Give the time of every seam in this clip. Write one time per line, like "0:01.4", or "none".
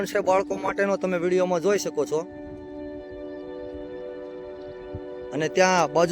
none